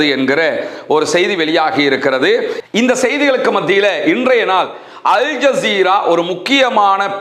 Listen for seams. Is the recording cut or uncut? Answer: cut